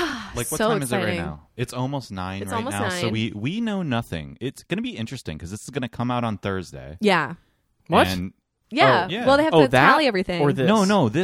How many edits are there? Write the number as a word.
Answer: zero